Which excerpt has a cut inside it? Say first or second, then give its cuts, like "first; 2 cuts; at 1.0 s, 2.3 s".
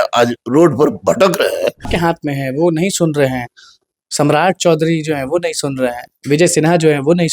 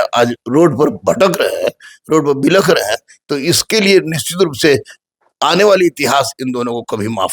first; 1 cut; at 1.9 s